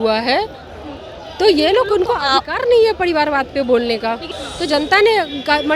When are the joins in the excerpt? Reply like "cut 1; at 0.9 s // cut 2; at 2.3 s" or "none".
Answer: cut 1; at 4.4 s